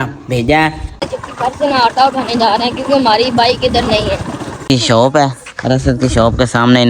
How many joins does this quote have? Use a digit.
2